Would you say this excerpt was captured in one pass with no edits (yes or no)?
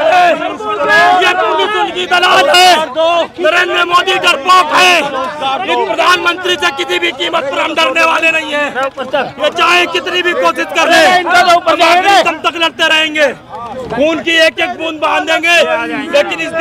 yes